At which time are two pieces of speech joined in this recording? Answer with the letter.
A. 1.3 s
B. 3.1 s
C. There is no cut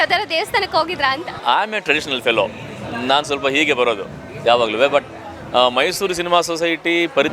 A